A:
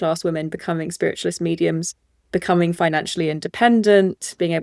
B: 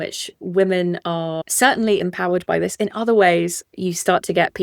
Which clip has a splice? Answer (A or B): B